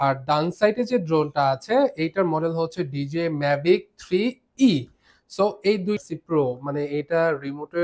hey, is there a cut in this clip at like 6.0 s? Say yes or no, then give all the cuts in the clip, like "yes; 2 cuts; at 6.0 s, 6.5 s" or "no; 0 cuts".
yes; 1 cut; at 6.0 s